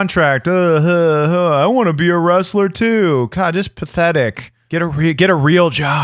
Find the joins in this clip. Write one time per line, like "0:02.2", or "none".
0:04.5